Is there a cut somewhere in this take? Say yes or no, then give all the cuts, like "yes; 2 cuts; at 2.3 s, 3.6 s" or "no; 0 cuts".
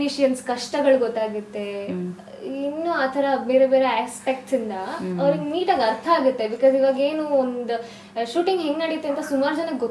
no; 0 cuts